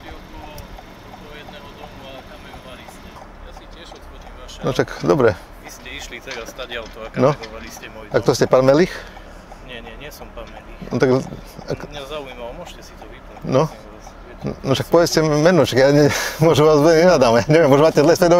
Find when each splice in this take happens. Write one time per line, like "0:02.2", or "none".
0:03.2